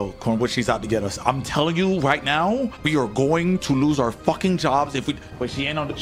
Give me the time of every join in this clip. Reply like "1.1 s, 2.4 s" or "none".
none